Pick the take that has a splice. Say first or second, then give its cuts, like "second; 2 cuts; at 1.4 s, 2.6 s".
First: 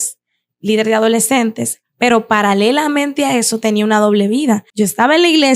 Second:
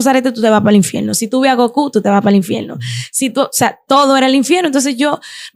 first; 1 cut; at 4.7 s